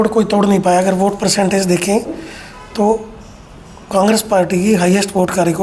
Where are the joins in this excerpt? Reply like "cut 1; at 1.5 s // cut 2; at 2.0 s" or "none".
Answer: none